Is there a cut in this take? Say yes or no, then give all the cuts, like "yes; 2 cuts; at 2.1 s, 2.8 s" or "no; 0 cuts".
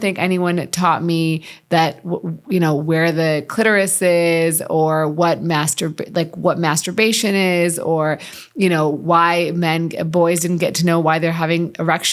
no; 0 cuts